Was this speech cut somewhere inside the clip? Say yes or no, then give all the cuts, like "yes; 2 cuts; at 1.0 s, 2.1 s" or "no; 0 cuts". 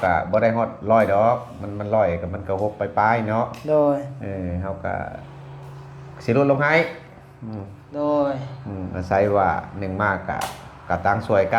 no; 0 cuts